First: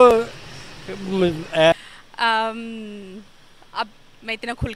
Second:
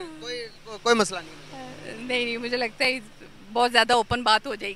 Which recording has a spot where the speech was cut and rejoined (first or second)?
first